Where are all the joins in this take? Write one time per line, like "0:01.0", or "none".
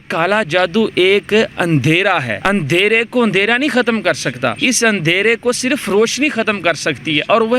0:02.3
0:04.6